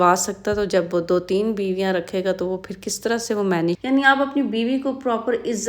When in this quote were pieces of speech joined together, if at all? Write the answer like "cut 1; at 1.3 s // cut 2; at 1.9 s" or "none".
cut 1; at 3.8 s